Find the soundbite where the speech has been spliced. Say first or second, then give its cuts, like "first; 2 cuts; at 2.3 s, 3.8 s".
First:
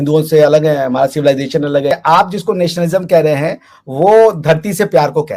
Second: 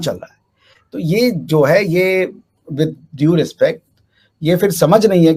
first; 1 cut; at 1.9 s